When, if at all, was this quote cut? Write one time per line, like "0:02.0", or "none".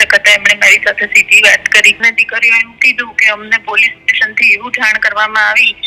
0:02.0